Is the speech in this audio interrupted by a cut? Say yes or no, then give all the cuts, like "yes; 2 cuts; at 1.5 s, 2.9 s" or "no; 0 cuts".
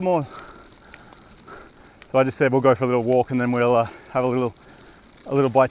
no; 0 cuts